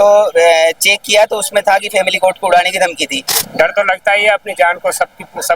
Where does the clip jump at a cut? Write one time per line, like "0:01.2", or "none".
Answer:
0:03.3

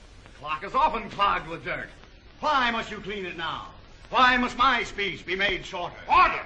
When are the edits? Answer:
0:04.8

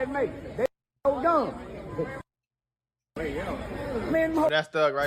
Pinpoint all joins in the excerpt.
none

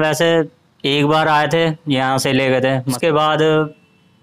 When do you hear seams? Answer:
0:03.0

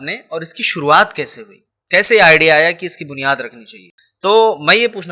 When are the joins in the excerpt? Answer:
0:03.8

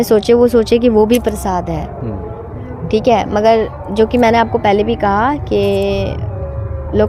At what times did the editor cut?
none

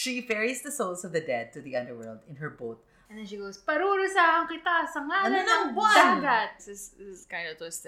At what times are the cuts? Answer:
0:03.0
0:06.6

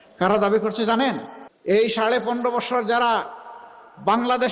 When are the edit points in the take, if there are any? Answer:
0:01.6

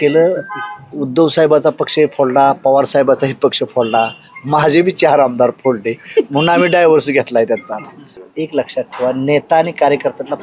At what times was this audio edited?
0:08.2

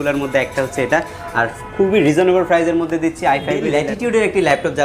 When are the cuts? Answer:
0:03.7

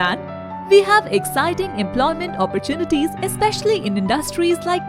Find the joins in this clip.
none

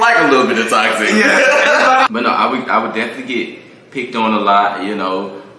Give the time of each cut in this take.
0:02.1

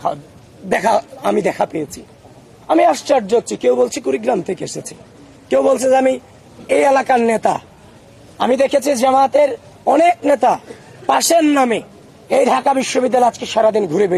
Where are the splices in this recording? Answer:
none

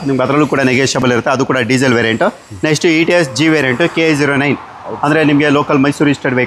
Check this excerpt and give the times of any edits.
none

